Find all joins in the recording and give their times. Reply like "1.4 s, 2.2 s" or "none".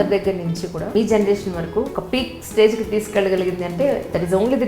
0.9 s, 2.0 s

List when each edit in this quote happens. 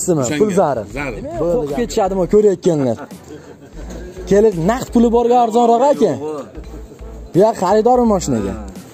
1.7 s

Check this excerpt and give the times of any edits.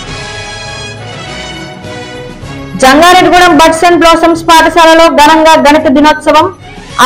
2.7 s

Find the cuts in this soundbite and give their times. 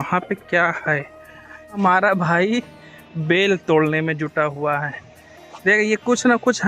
1.8 s

